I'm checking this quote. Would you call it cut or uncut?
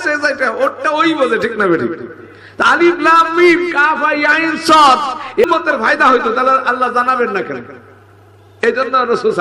cut